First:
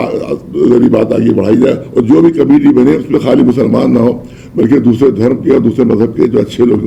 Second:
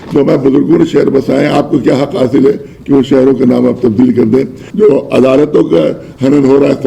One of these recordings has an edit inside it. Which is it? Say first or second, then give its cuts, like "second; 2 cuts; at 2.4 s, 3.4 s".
second; 1 cut; at 4.6 s